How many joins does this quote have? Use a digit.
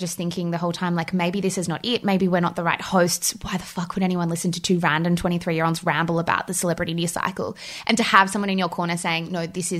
0